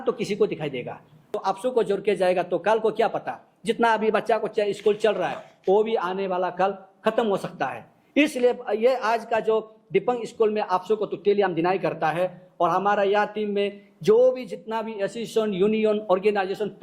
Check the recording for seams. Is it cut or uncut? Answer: cut